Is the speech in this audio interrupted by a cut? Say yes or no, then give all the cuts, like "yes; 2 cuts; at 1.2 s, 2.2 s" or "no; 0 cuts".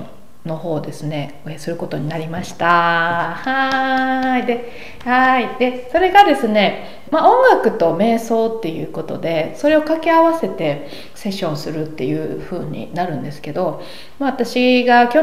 yes; 1 cut; at 6.9 s